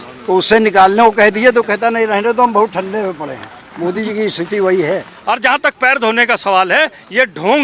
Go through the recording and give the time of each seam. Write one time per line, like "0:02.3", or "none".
0:05.1